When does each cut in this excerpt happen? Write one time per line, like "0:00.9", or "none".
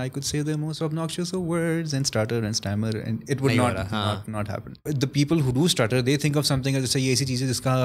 0:04.9

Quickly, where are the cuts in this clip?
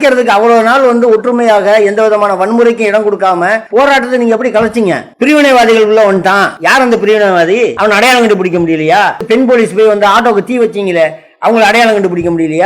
0:03.6
0:05.1
0:06.5
0:07.7
0:09.2

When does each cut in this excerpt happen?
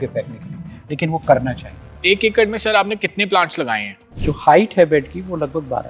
0:02.0
0:04.2

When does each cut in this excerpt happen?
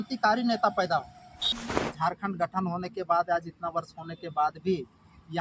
0:01.6

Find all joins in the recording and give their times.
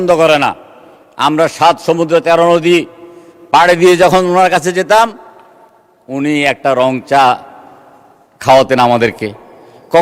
none

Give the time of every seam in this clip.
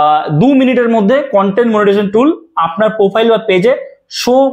none

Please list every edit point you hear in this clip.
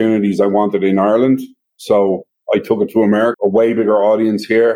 0:03.3

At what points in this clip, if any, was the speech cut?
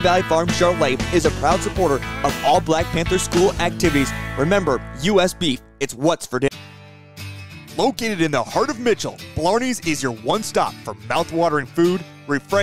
0:06.5

